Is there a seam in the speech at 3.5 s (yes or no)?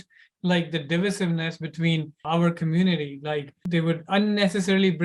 yes